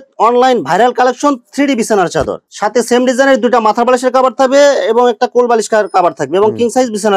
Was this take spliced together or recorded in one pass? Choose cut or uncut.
uncut